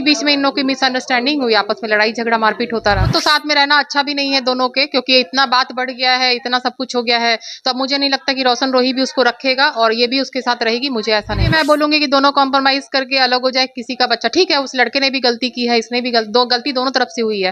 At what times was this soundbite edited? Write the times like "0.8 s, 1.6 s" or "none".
3.1 s, 11.4 s